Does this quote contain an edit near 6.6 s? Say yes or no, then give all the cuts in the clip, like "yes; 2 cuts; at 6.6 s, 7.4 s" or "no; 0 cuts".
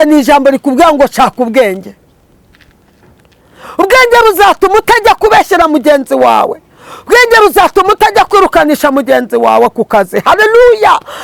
no; 0 cuts